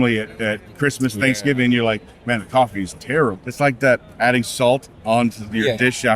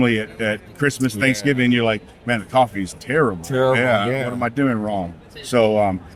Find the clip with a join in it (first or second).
first